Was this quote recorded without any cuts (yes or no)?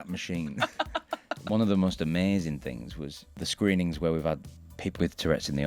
no